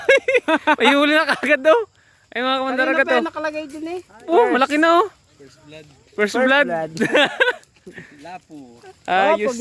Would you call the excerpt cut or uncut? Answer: cut